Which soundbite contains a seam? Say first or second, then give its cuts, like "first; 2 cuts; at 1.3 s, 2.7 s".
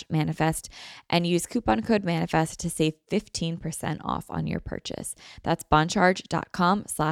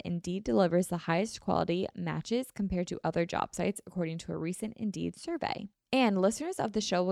second; 1 cut; at 5.7 s